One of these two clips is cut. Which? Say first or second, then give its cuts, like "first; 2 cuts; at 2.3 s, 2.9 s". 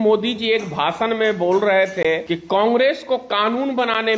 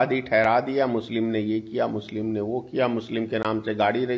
first; 1 cut; at 2.2 s